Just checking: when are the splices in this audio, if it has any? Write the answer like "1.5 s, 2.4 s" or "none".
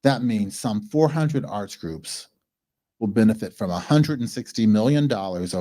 none

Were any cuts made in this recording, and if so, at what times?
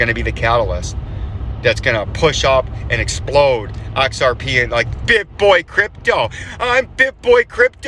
none

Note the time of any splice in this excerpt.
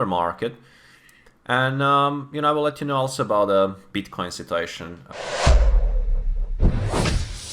5.1 s

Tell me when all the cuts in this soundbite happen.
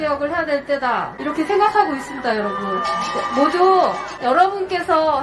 1.1 s, 4.1 s

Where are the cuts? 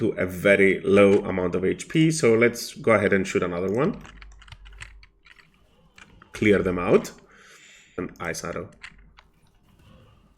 8.0 s

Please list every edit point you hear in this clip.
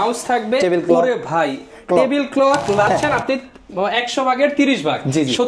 2.9 s

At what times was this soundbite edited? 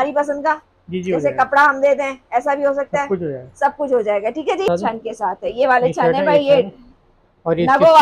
4.7 s

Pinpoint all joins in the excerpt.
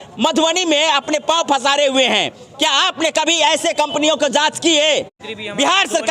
5.2 s

